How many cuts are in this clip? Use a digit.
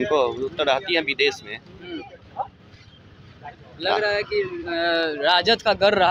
0